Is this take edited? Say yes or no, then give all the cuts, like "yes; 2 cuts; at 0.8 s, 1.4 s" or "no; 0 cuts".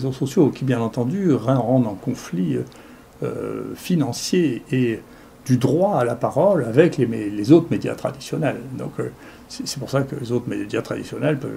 no; 0 cuts